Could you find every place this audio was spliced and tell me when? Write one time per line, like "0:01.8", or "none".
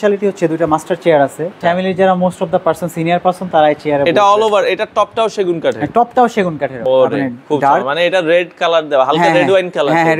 0:01.6
0:06.8